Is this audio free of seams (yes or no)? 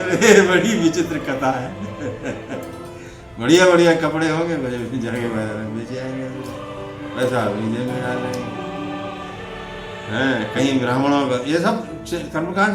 no